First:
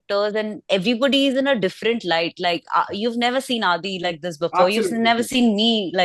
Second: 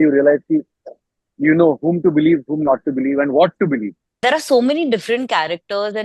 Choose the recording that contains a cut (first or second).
second